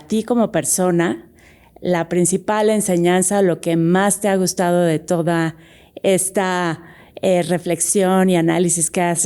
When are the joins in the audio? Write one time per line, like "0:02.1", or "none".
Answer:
none